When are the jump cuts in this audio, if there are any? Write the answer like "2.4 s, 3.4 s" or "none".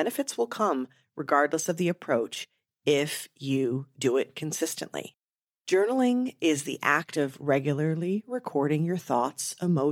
none

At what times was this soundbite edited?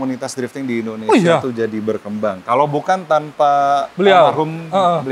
none

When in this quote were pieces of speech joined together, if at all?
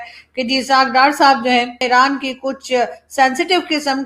1.8 s

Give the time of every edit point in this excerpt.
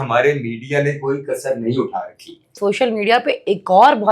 2.6 s

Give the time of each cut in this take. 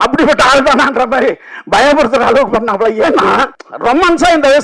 3.6 s

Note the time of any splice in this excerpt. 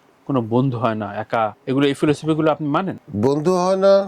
1.6 s, 3.0 s

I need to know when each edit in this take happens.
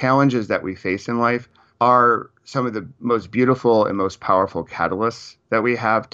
none

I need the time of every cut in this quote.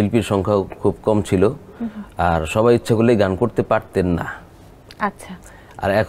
none

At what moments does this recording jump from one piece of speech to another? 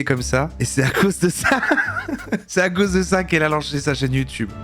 2.5 s

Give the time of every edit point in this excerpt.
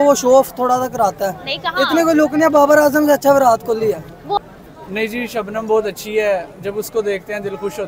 4.4 s

